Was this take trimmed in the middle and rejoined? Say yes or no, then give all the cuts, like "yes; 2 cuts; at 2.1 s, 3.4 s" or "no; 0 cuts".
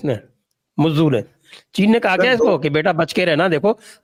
no; 0 cuts